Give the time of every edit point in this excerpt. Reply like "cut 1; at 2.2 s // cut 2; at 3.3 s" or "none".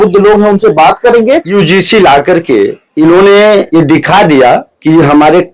cut 1; at 1.5 s // cut 2; at 2.8 s // cut 3; at 3.7 s // cut 4; at 4.7 s